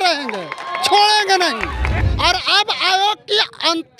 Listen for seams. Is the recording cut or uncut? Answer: cut